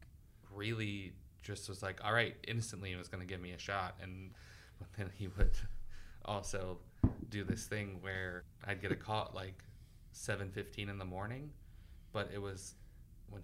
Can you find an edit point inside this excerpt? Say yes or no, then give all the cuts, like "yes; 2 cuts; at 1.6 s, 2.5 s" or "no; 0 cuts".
yes; 2 cuts; at 4.3 s, 8.5 s